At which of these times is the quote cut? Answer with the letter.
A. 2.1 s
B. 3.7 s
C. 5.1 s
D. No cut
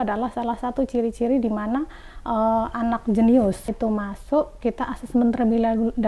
B